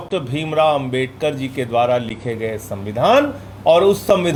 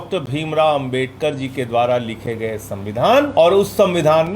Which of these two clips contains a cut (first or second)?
second